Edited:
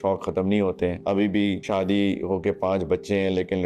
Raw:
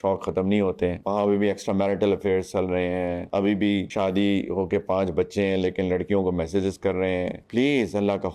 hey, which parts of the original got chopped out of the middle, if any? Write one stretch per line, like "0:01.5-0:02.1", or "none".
0:01.0-0:03.2